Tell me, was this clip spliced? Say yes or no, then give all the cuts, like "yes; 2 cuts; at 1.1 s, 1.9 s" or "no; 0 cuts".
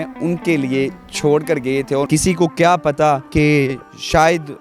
yes; 2 cuts; at 2.1 s, 3.3 s